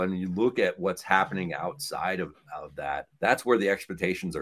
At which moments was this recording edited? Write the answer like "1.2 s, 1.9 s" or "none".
3.1 s